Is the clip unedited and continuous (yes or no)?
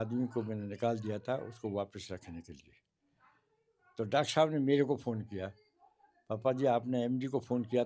yes